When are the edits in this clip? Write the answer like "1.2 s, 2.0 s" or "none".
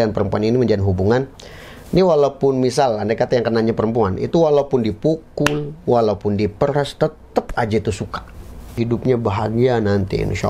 8.8 s